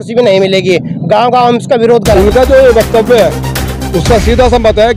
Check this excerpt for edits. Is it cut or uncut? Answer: cut